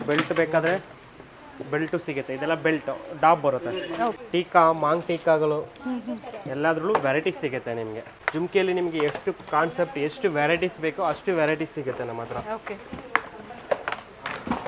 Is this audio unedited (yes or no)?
no